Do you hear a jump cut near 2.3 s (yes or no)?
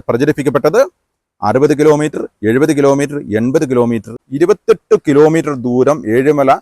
no